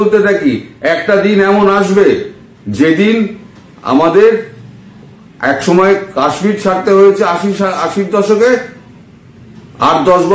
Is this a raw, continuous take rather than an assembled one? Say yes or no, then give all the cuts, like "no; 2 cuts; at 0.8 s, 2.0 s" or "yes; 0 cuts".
yes; 0 cuts